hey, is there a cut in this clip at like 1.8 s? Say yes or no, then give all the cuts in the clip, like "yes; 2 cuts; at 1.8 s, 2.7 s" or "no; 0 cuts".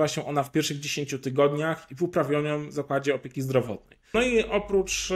no; 1 cut; at 3.9 s